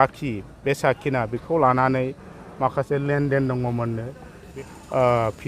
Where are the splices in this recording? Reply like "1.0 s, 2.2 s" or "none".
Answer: 4.5 s